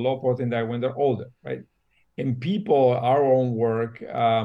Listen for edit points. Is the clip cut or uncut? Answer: uncut